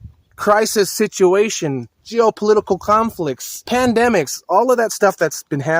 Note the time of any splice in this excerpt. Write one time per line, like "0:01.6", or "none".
0:03.6

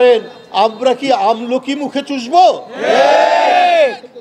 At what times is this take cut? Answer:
none

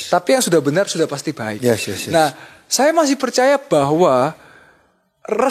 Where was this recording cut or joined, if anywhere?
none

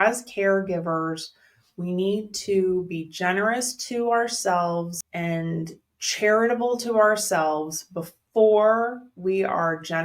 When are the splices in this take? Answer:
0:05.0

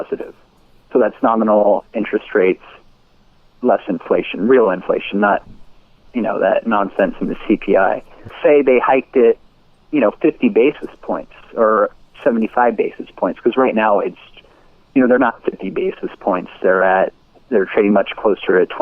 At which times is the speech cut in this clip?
0:08.3

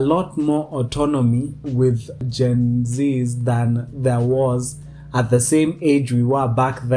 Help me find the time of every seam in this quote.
0:01.7

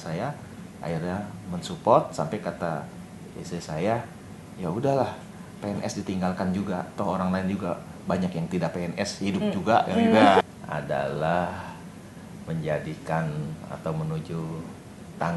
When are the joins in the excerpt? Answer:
0:10.4

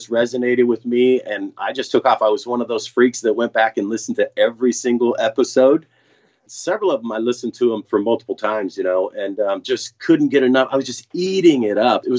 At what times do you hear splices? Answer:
0:06.0

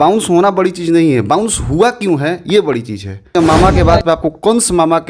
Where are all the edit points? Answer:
0:03.4

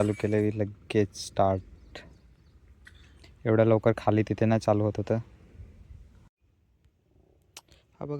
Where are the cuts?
0:06.3

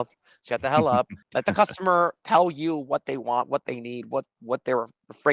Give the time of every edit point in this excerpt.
0:01.2

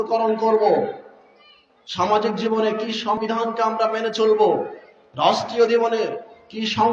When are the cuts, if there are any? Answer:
0:03.2

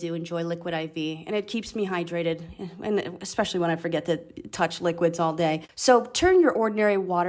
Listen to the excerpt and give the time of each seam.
0:05.6

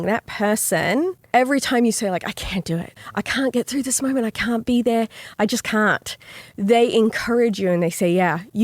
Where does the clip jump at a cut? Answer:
0:01.2
0:03.0
0:05.2

